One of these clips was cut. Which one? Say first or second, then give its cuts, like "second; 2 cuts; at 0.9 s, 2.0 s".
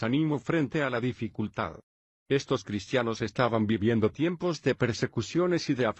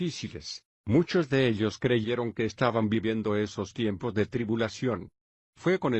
second; 1 cut; at 1.8 s